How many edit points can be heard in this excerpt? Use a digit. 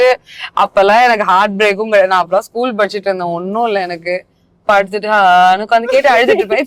0